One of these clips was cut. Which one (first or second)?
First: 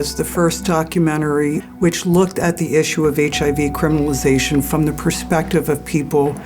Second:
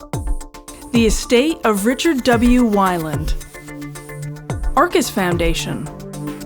first